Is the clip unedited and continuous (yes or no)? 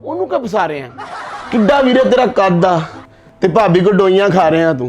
no